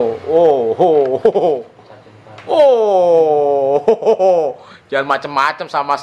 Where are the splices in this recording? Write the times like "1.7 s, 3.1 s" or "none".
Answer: none